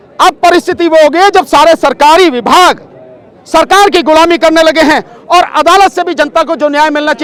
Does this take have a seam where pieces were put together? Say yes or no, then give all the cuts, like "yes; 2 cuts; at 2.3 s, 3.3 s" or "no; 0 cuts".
no; 0 cuts